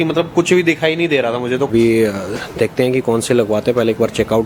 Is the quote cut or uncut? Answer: cut